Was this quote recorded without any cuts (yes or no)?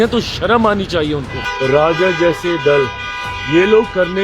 no